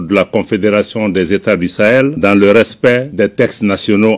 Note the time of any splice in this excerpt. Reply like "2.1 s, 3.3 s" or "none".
2.1 s, 3.1 s

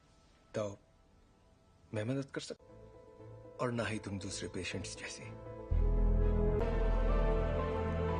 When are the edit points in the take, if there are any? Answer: 6.6 s

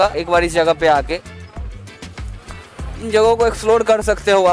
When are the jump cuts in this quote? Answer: none

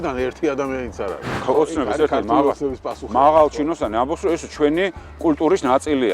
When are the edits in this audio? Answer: 1.4 s

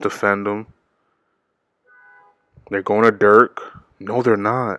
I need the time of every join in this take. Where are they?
none

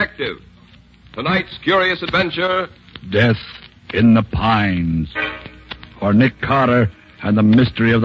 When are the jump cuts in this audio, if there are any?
none

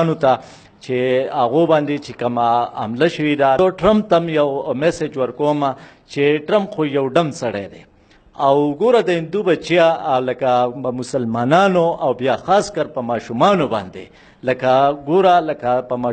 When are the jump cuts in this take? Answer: 3.6 s

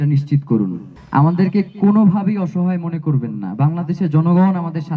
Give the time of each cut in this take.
0.9 s

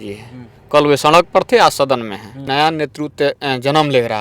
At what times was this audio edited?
2.5 s

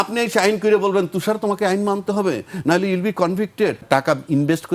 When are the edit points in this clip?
3.8 s

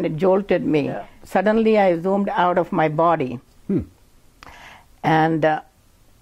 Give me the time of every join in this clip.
1.1 s

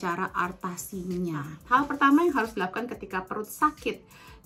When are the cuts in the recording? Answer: 1.5 s

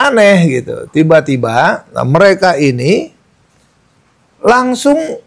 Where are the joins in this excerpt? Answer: none

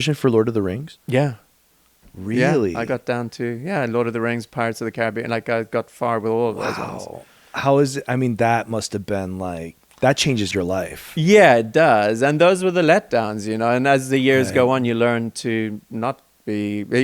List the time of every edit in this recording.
0.9 s

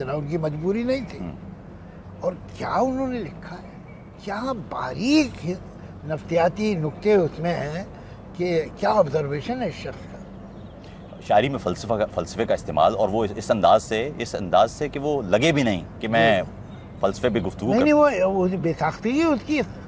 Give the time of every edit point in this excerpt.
none

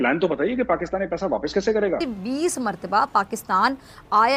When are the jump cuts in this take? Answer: 2.2 s

